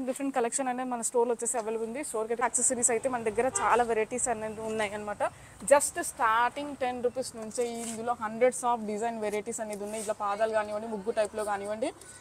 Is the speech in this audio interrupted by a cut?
yes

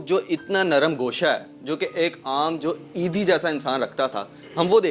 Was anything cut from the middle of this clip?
no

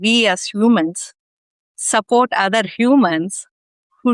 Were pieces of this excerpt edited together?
no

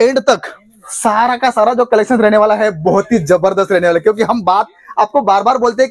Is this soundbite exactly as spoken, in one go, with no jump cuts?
yes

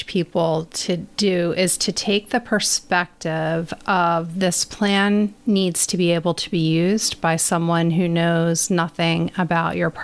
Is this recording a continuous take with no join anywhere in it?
no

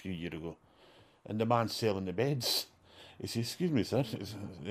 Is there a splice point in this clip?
no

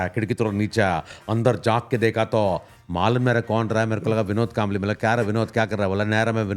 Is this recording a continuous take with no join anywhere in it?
yes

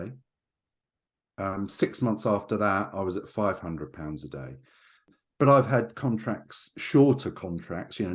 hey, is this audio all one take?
no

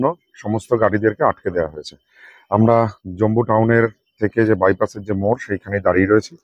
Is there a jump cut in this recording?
no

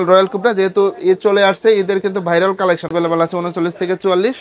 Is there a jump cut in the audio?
yes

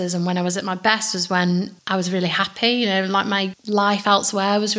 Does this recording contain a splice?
yes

